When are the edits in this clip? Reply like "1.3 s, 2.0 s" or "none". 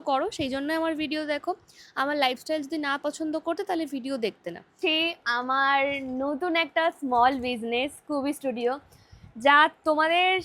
4.8 s